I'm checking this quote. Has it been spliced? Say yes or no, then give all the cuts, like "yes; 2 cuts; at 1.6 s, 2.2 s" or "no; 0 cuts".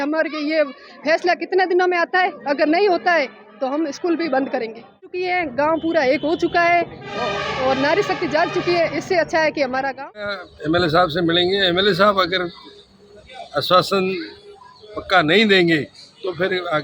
yes; 2 cuts; at 5.2 s, 10.5 s